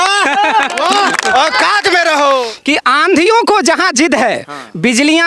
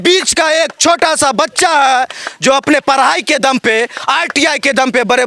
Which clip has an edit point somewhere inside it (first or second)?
first